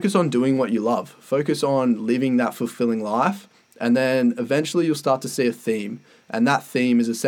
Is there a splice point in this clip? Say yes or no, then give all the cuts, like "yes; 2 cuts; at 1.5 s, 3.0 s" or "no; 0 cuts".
no; 0 cuts